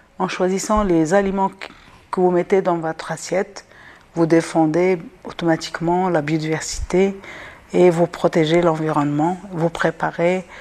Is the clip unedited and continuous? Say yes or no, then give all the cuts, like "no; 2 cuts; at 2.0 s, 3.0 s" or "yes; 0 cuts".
yes; 0 cuts